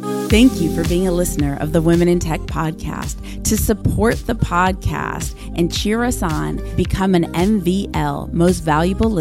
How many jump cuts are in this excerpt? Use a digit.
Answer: 0